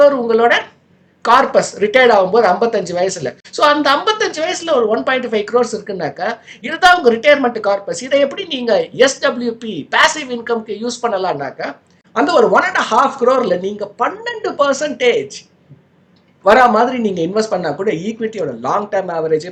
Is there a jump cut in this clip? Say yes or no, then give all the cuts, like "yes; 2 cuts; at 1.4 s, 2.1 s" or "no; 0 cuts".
no; 0 cuts